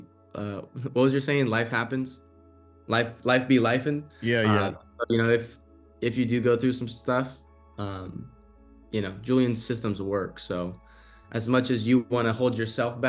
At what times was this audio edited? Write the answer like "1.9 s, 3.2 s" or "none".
none